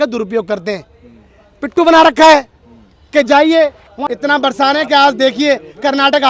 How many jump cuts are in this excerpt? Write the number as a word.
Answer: one